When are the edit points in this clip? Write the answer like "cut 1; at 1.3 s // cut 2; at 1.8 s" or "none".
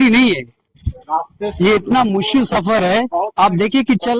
none